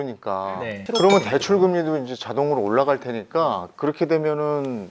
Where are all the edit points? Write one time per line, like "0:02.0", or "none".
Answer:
0:00.9